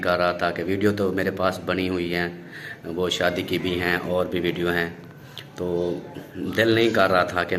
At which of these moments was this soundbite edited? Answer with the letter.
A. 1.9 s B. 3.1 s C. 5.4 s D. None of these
D